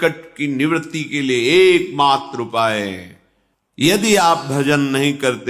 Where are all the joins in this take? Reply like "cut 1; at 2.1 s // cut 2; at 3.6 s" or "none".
cut 1; at 3.8 s